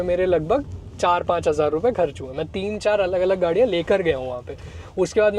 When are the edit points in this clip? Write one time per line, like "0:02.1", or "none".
none